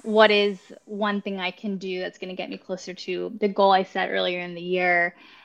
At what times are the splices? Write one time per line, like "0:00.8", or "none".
none